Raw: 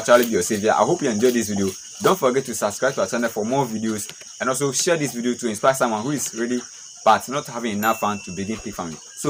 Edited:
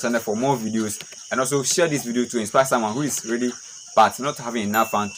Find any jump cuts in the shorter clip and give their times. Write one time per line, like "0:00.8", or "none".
none